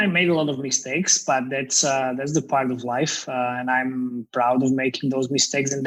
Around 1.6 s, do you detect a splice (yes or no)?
no